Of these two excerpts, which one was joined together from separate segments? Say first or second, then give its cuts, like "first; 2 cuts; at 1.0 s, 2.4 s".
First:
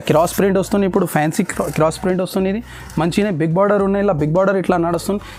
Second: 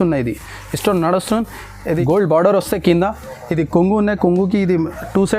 second; 1 cut; at 2.0 s